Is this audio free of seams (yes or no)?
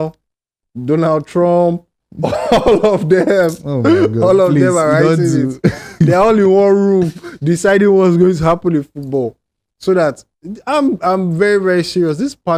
yes